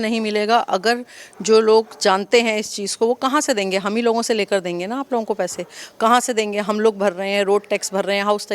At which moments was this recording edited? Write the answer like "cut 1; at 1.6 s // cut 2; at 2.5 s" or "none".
none